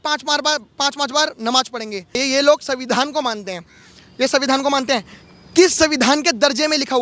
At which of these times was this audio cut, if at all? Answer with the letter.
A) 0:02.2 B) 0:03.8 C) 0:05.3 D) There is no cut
A